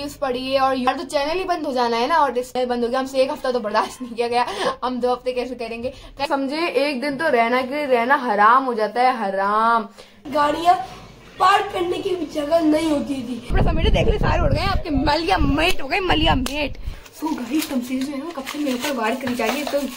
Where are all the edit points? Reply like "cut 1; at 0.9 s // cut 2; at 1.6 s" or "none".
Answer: cut 1; at 0.9 s // cut 2; at 2.5 s // cut 3; at 6.2 s // cut 4; at 10.2 s // cut 5; at 13.5 s // cut 6; at 17.0 s

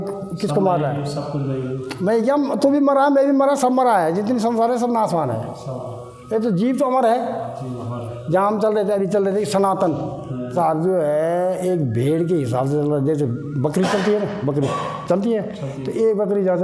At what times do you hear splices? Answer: cut 1; at 10.5 s

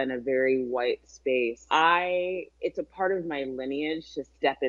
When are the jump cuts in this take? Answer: cut 1; at 1.6 s // cut 2; at 2.5 s

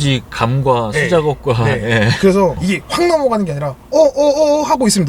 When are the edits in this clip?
cut 1; at 2.6 s

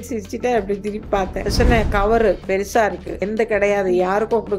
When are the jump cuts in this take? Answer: cut 1; at 1.4 s // cut 2; at 3.2 s

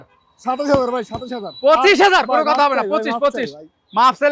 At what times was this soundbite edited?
none

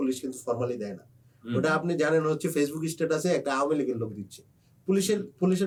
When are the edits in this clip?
none

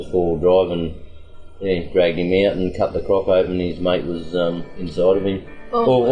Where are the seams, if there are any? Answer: cut 1; at 4.7 s

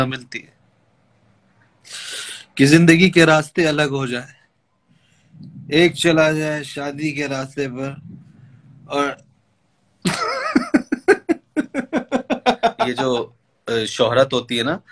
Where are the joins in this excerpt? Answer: cut 1; at 12.9 s

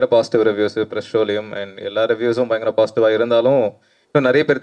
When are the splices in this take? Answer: none

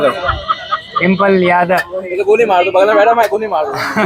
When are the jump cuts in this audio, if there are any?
none

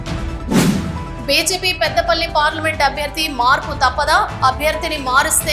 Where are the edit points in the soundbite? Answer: cut 1; at 1.0 s

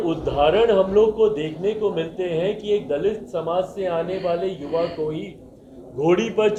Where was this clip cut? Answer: none

